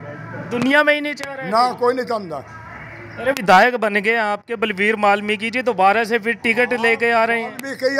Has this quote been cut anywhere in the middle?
no; 0 cuts

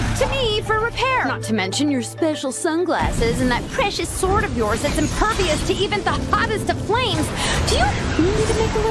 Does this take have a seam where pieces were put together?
no; 0 cuts

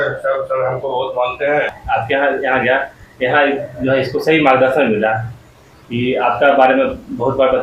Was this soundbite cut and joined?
yes; 1 cut; at 1.7 s

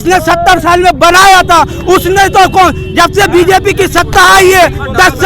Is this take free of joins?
yes; 0 cuts

